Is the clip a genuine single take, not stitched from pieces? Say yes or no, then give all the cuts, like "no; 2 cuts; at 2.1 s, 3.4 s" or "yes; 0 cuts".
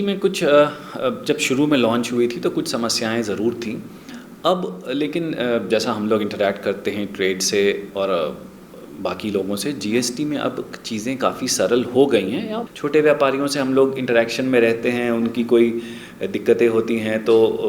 no; 1 cut; at 12.6 s